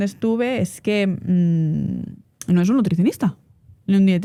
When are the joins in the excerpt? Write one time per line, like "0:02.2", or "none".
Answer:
none